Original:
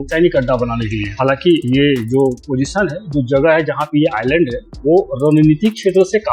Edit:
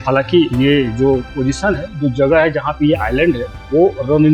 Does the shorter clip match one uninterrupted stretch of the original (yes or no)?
yes